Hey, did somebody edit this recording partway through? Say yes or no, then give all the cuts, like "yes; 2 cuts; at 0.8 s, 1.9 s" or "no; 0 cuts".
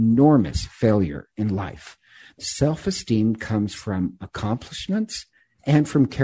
yes; 1 cut; at 2.3 s